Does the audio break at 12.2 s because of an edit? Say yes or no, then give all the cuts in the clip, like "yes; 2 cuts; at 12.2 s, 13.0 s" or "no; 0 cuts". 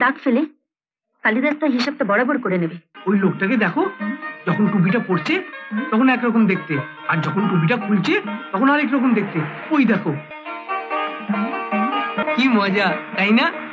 yes; 3 cuts; at 2.9 s, 10.3 s, 12.2 s